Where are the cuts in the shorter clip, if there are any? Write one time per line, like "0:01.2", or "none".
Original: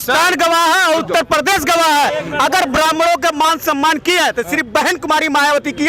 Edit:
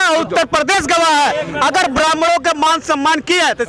none